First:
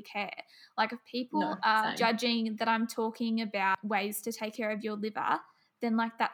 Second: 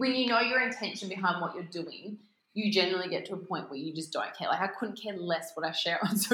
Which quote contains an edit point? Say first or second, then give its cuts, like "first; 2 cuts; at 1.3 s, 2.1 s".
first; 2 cuts; at 1.9 s, 3.8 s